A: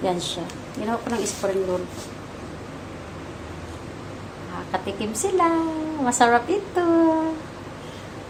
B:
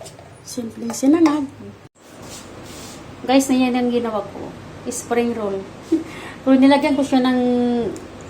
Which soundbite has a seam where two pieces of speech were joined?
B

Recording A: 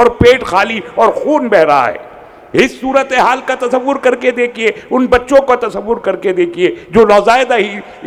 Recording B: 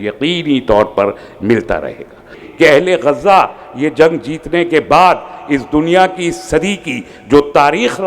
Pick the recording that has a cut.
B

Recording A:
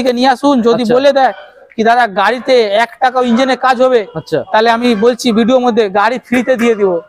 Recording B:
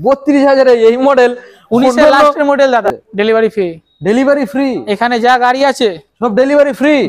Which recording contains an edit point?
B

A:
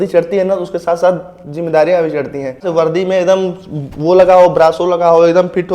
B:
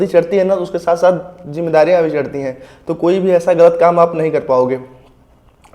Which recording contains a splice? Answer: A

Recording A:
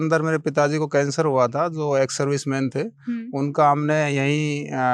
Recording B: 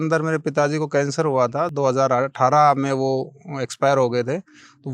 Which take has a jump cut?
B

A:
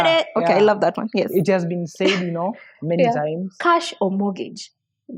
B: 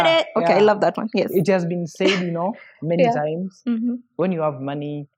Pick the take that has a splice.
A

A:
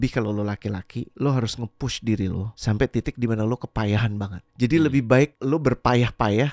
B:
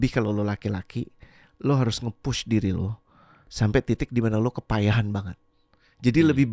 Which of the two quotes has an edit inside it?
A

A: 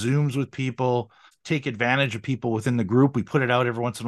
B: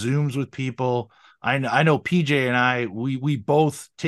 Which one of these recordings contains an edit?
A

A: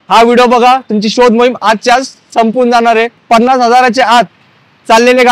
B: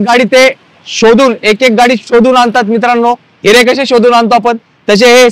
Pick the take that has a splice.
A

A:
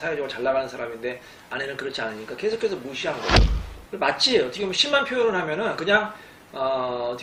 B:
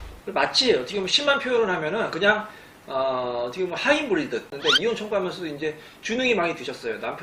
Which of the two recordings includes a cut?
B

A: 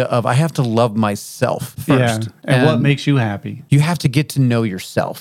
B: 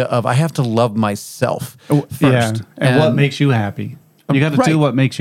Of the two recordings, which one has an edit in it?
A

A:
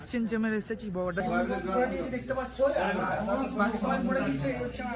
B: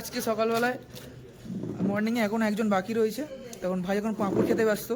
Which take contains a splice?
A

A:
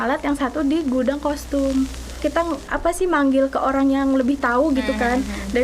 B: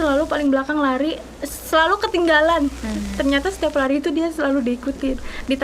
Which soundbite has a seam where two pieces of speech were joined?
A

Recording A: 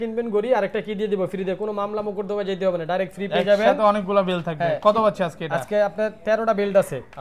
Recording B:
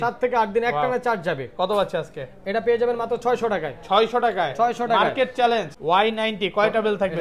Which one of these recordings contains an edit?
B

